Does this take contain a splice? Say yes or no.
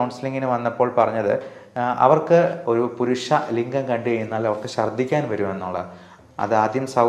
yes